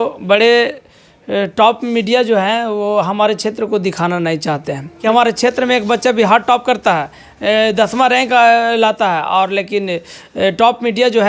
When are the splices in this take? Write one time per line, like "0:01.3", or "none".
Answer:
0:04.8